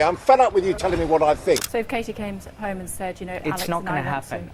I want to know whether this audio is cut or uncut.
cut